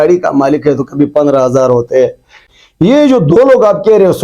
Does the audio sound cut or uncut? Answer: cut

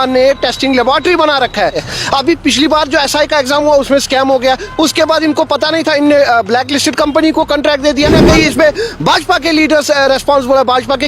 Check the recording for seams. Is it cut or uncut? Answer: cut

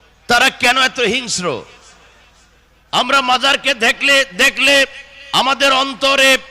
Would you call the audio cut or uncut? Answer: uncut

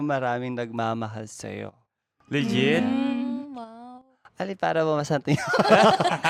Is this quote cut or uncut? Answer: uncut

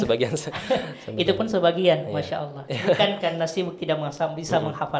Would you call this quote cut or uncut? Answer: cut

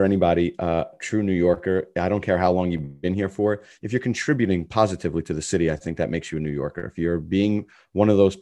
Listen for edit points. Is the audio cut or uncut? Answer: cut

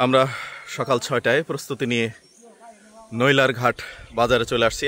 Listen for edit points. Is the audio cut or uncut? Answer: uncut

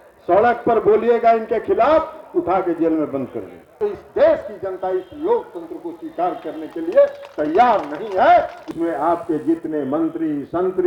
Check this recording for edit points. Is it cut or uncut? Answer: cut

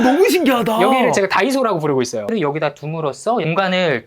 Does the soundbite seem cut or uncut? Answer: cut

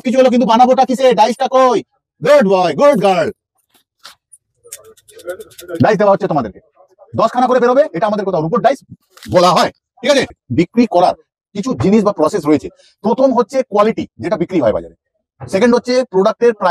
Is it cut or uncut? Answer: cut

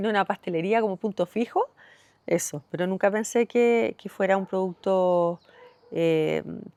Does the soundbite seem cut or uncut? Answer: uncut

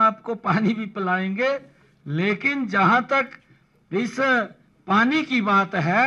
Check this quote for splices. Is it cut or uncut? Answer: uncut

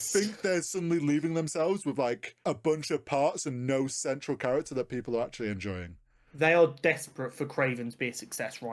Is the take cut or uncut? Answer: cut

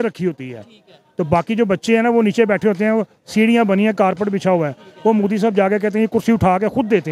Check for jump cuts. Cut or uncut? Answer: uncut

